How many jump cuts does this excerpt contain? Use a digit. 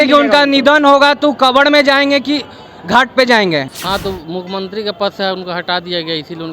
1